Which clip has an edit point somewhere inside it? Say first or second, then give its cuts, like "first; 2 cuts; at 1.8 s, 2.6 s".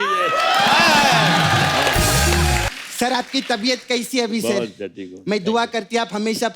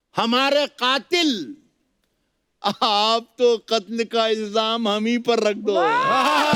first; 1 cut; at 2.7 s